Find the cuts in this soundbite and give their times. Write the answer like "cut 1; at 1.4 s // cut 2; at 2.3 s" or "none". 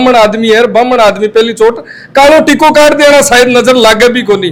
none

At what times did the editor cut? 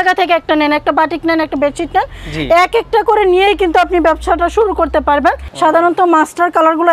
cut 1; at 5.5 s

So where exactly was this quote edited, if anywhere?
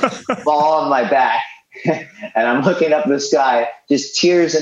none

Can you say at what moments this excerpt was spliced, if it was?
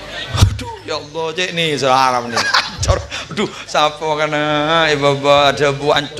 cut 1; at 2.4 s

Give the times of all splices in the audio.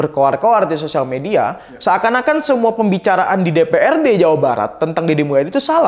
none

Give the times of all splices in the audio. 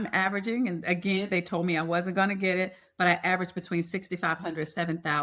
none

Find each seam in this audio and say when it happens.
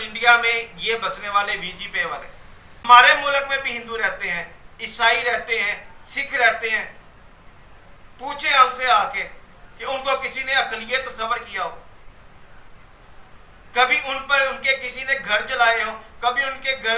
cut 1; at 2.8 s

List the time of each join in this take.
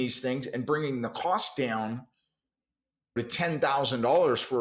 cut 1; at 3.2 s

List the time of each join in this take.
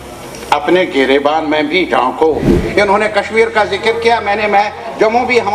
cut 1; at 2.6 s

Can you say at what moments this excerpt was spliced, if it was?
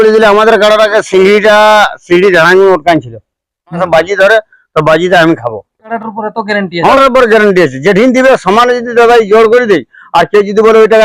cut 1; at 3.8 s // cut 2; at 5.9 s // cut 3; at 7.0 s

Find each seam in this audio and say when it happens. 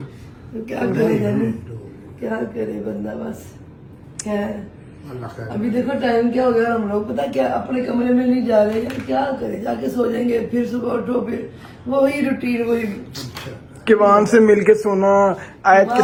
none

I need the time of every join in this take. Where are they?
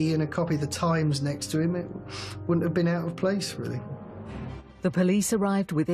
none

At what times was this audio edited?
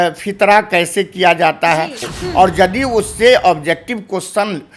cut 1; at 2.0 s

